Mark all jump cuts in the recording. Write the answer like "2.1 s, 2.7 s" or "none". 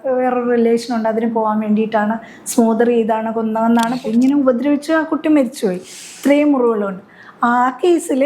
3.9 s